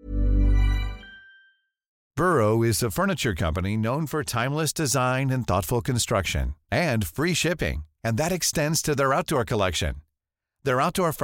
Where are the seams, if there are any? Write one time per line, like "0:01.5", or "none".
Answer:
0:02.0